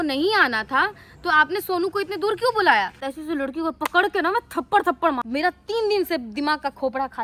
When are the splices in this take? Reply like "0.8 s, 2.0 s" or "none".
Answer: 3.1 s, 5.2 s